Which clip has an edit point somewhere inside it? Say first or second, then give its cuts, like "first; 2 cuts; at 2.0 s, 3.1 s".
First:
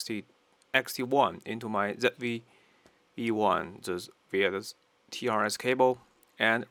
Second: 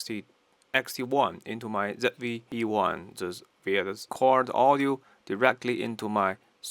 second; 2 cuts; at 2.4 s, 4.0 s